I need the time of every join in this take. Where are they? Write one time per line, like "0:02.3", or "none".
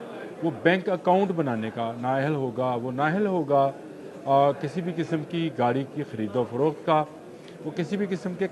none